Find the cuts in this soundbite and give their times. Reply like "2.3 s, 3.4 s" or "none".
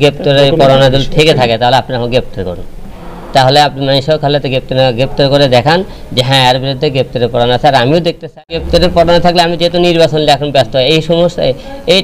8.4 s